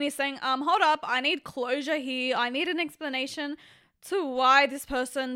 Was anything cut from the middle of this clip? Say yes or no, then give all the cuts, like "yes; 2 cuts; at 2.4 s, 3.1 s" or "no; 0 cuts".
no; 0 cuts